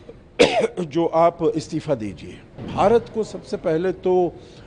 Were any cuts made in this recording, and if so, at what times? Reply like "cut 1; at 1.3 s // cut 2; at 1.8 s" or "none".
cut 1; at 2.7 s